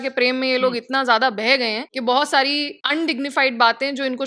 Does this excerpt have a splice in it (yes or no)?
yes